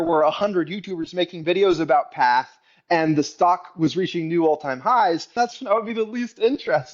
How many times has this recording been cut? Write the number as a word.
one